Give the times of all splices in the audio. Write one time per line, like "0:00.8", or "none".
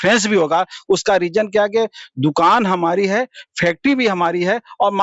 none